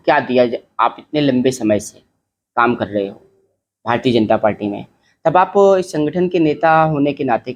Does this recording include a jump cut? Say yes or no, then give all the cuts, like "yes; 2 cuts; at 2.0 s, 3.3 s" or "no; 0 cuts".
no; 0 cuts